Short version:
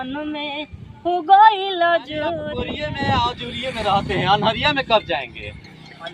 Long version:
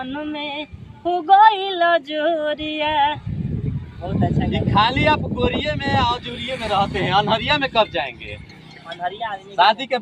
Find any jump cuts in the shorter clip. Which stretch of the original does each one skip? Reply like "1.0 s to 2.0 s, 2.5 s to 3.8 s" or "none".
2.5 s to 5.4 s